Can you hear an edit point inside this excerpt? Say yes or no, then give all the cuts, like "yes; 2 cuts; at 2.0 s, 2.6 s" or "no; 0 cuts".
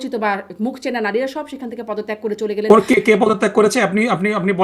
no; 0 cuts